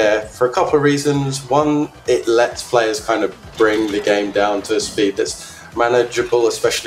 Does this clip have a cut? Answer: no; 0 cuts

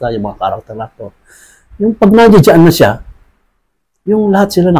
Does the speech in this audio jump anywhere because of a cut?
no; 0 cuts

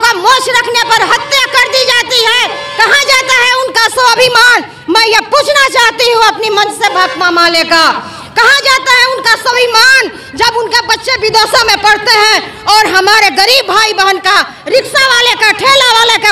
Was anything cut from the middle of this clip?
no; 0 cuts

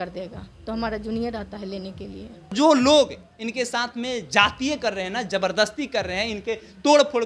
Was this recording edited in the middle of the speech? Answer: yes; 1 cut; at 2.5 s

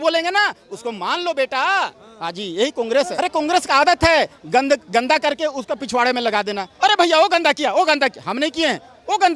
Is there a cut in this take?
yes; 1 cut; at 3.1 s

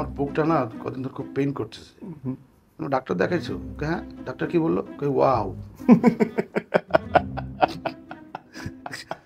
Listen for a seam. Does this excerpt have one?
no; 0 cuts

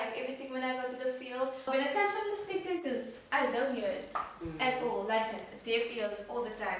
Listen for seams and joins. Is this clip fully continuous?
no; 1 cut; at 1.6 s

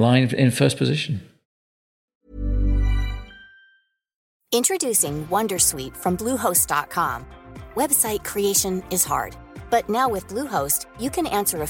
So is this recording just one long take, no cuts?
no; 1 cut; at 1.6 s

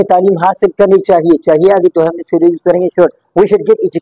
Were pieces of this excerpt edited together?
no; 0 cuts

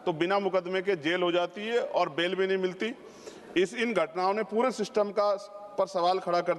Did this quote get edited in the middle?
no; 0 cuts

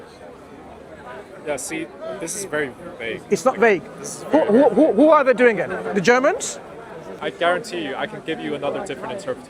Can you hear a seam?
yes; 1 cut; at 7.2 s

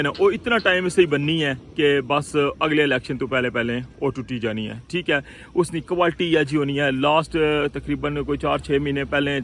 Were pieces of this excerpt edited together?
no; 0 cuts

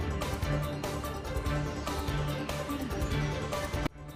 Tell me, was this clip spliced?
no; 0 cuts

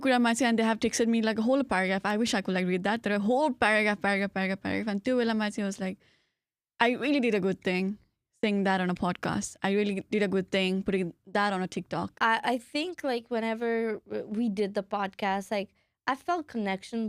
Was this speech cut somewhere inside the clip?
yes; 1 cut; at 12.1 s

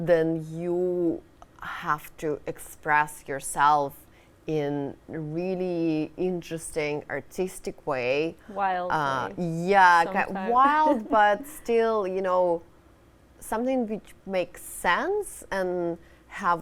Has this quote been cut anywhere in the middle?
no; 0 cuts

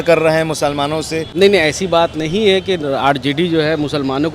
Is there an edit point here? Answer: yes; 1 cut; at 1.2 s

